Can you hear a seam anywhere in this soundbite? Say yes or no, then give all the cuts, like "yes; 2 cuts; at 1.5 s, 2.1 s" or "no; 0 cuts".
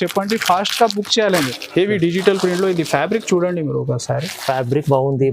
yes; 1 cut; at 1.6 s